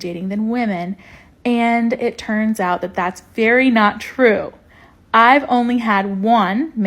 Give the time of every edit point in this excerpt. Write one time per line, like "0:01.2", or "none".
0:01.1